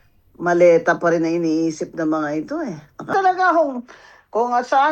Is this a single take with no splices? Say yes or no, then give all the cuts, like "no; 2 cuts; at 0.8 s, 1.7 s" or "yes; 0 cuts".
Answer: no; 1 cut; at 3.1 s